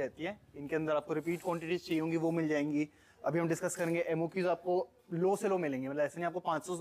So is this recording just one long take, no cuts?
yes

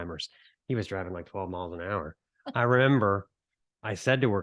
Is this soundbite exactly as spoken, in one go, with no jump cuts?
yes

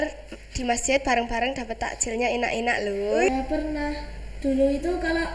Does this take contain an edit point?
yes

